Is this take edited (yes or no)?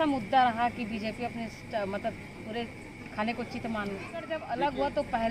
yes